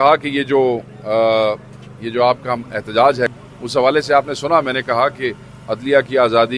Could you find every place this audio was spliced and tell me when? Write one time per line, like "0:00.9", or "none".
none